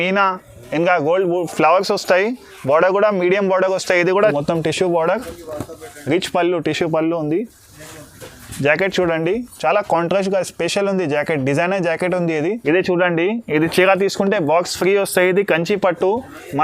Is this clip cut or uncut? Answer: cut